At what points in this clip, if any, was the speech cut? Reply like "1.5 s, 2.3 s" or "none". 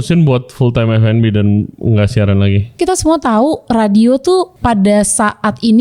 2.7 s, 4.5 s